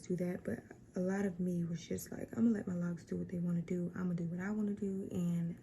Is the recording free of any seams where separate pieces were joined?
yes; 0 cuts

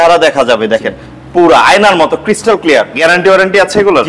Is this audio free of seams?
no; 1 cut; at 2.9 s

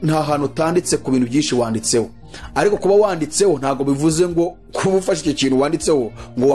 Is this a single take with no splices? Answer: yes; 0 cuts

